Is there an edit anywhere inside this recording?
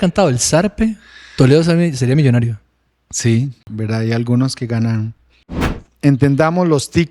yes; 2 cuts; at 3.6 s, 5.8 s

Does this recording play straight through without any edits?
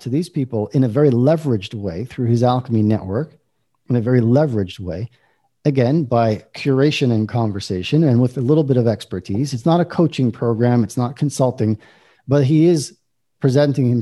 yes; 0 cuts

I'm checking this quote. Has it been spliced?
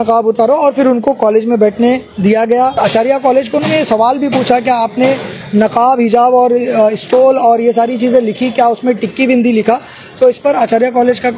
yes; 1 cut; at 2.7 s

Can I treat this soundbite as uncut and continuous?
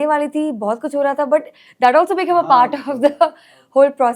yes; 0 cuts

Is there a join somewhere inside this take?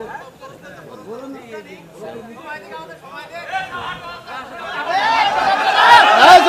no; 0 cuts

